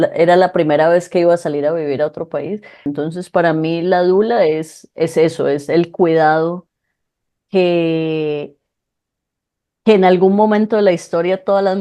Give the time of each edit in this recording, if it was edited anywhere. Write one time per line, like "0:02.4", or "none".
0:02.9